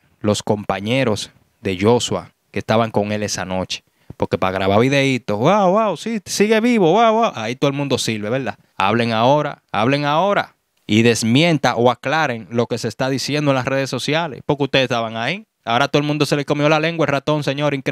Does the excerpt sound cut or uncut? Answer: uncut